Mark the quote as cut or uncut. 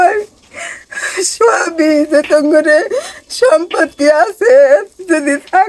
uncut